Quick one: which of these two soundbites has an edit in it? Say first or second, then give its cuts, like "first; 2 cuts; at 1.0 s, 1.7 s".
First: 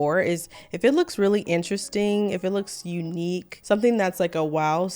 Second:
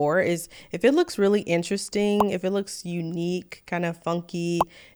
first; 1 cut; at 3.5 s